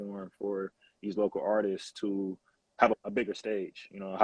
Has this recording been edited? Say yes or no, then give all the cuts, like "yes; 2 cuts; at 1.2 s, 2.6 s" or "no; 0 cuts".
no; 0 cuts